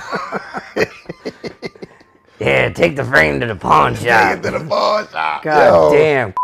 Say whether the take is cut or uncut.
uncut